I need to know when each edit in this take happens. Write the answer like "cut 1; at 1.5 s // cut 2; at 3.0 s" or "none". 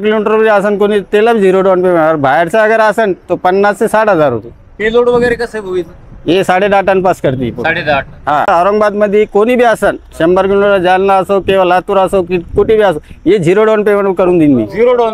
cut 1; at 8.5 s